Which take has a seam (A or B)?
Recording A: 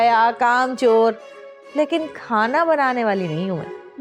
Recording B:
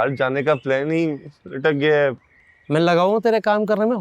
B